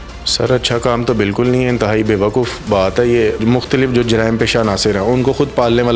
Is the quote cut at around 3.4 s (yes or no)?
yes